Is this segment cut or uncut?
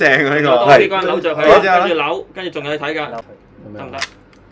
cut